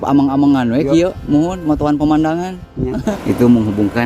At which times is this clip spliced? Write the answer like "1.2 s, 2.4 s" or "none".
3.1 s